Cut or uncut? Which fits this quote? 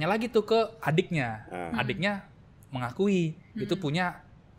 uncut